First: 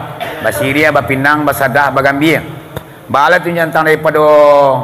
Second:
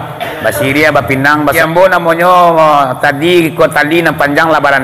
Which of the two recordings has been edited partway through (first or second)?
second